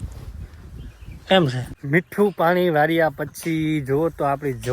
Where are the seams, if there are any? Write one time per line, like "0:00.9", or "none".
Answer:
0:01.8